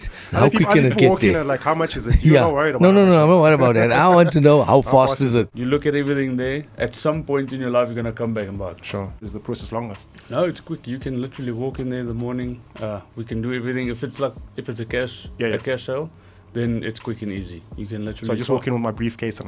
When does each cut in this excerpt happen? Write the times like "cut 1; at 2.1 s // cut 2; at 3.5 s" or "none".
cut 1; at 5.6 s // cut 2; at 9.2 s